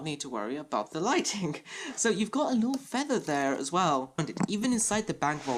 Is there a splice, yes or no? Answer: yes